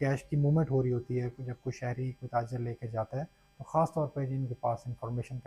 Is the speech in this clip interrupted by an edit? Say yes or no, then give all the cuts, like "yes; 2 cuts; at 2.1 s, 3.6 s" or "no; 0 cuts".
no; 0 cuts